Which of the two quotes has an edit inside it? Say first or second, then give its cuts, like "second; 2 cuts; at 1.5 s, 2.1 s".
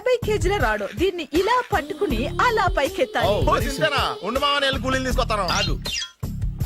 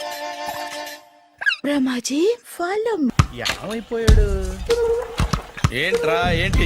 second; 1 cut; at 3.1 s